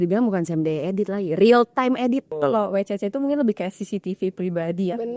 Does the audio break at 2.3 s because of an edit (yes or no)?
yes